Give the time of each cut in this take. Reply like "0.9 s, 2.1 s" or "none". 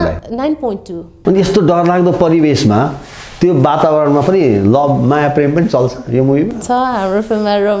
1.1 s